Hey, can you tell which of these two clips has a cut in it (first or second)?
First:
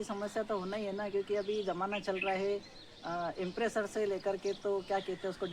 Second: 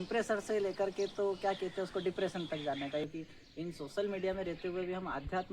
second